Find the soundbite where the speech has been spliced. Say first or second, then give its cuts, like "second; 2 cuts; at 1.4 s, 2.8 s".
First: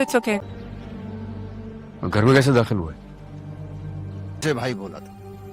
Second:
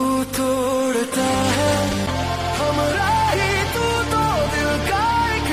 first; 1 cut; at 4.4 s